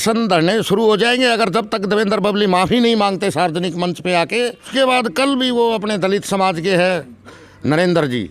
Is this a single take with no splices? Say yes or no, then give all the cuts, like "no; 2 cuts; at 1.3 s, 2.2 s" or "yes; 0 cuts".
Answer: no; 1 cut; at 4.7 s